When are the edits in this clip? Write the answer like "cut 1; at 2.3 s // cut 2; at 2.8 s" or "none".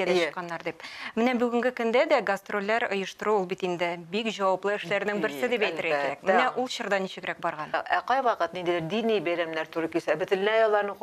cut 1; at 7.8 s